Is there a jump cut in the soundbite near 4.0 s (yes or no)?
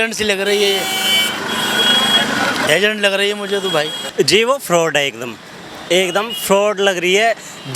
yes